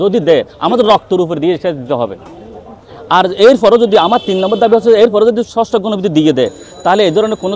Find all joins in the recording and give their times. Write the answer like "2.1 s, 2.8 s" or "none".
none